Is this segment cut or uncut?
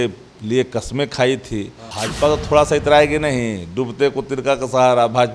cut